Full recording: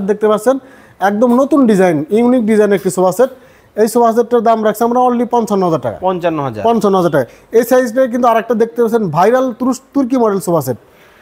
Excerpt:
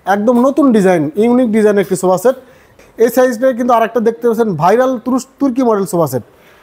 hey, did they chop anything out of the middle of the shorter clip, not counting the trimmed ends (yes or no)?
yes